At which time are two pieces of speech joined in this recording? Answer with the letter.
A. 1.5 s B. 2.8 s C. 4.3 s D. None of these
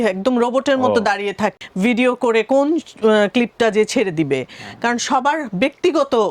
A